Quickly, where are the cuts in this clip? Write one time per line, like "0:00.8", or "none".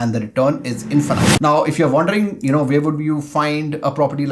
0:01.3